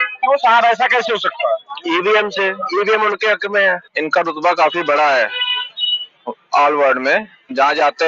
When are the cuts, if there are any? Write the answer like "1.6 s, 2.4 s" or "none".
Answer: 3.9 s